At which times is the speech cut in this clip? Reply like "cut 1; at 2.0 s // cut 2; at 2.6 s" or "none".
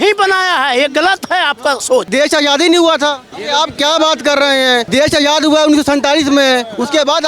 cut 1; at 2.1 s // cut 2; at 3.3 s // cut 3; at 4.9 s